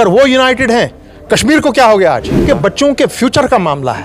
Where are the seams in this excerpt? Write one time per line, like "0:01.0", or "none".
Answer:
0:02.4